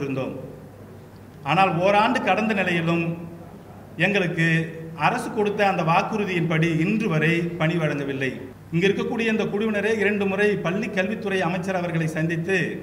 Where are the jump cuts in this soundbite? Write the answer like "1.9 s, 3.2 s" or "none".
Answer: 8.5 s